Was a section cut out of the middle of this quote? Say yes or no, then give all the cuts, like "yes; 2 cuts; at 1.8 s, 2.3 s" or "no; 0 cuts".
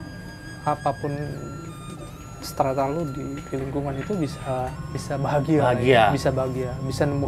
yes; 1 cut; at 5.0 s